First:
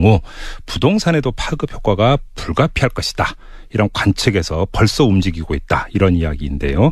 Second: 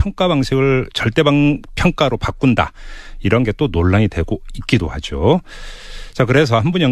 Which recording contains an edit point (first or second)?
second